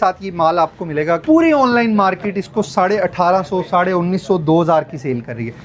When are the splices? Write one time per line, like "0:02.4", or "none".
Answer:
0:01.2